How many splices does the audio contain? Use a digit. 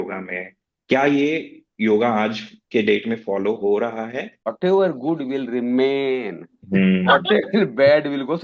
1